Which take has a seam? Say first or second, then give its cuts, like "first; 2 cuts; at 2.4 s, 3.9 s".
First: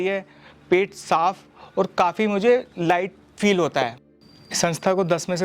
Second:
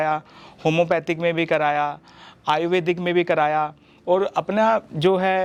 first; 1 cut; at 4.1 s